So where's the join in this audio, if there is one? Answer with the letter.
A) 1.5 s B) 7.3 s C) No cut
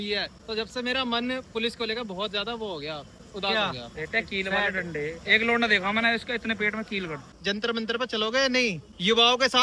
B